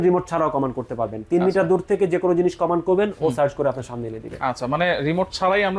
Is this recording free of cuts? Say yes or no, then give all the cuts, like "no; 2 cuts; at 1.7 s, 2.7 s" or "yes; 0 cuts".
yes; 0 cuts